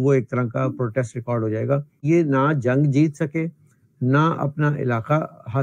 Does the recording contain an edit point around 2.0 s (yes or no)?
yes